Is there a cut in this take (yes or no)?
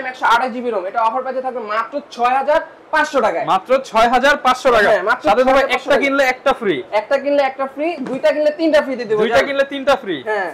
no